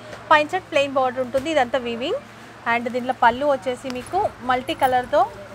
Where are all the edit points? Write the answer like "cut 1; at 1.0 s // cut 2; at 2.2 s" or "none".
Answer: none